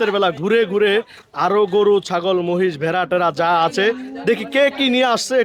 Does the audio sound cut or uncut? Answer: uncut